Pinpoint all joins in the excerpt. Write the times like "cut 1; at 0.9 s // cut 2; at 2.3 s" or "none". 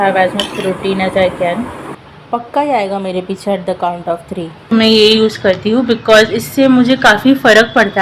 cut 1; at 1.9 s // cut 2; at 4.7 s